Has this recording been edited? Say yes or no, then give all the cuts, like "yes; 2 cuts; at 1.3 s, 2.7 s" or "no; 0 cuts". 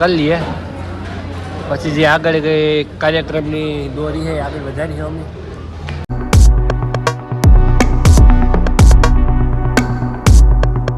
no; 0 cuts